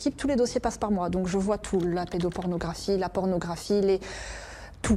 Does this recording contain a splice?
no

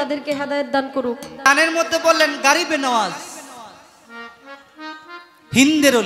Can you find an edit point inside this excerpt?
yes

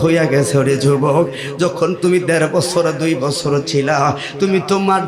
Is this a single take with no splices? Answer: yes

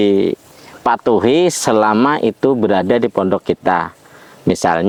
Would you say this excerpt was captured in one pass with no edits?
yes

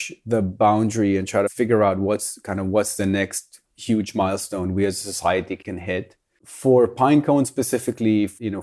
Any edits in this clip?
no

